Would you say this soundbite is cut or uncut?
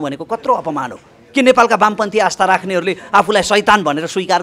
uncut